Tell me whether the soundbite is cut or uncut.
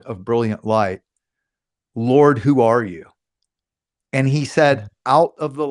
uncut